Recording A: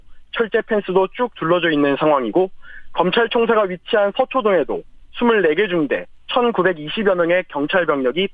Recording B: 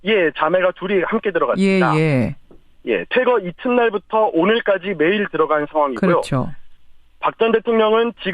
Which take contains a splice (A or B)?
A